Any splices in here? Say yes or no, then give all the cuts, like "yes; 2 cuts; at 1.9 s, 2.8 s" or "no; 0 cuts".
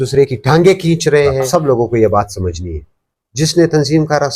yes; 1 cut; at 1.5 s